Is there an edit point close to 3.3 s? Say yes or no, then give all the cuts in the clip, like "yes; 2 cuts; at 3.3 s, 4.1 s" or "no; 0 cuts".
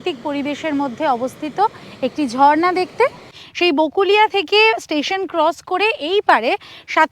yes; 1 cut; at 3.3 s